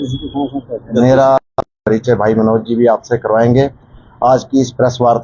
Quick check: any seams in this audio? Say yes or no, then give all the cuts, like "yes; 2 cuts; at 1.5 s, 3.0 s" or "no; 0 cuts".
yes; 1 cut; at 1.8 s